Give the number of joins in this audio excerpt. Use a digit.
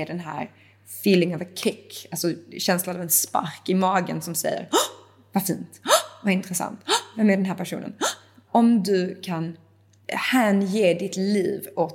1